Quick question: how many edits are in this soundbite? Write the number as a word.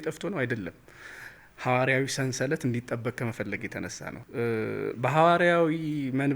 one